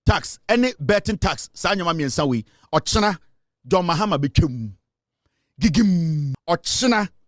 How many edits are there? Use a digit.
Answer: 1